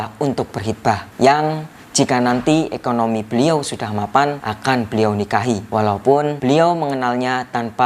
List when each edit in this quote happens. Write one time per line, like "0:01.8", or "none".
0:01.1
0:04.5
0:05.6
0:06.4